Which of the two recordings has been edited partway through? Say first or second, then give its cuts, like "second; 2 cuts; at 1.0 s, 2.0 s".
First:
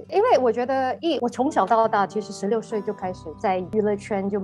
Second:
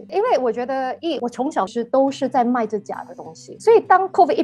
second; 1 cut; at 1.7 s